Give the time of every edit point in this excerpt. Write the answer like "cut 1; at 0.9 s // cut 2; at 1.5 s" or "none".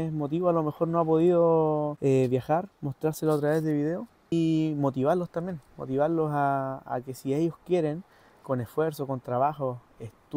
cut 1; at 1.9 s // cut 2; at 4.3 s